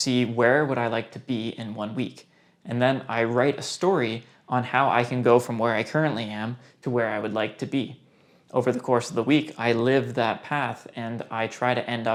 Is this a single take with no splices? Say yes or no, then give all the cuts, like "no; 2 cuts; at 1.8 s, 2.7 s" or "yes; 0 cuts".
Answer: yes; 0 cuts